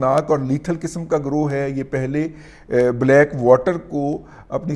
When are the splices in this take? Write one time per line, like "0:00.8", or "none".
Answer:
none